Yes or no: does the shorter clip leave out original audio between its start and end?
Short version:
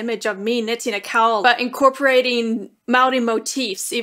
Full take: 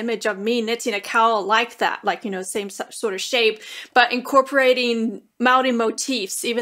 yes